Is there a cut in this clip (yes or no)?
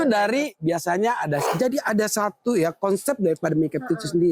yes